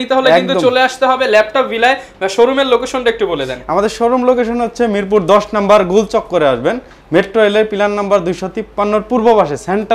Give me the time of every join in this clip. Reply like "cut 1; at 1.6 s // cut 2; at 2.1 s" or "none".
none